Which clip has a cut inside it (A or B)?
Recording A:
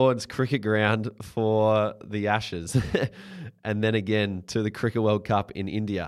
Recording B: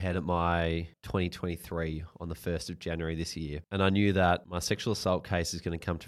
B